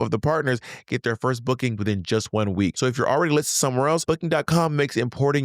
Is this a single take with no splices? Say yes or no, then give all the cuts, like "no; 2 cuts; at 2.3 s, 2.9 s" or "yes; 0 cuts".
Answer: no; 3 cuts; at 1.8 s, 2.8 s, 4.0 s